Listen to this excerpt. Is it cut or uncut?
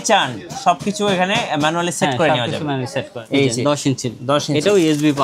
cut